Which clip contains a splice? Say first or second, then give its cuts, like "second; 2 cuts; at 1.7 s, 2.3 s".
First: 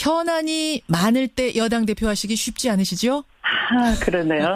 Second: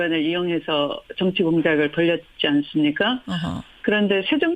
second; 1 cut; at 2.5 s